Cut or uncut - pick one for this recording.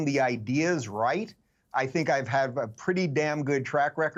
uncut